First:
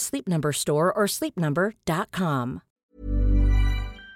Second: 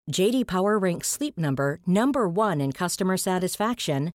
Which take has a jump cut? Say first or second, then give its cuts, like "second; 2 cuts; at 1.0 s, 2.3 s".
first; 1 cut; at 2.9 s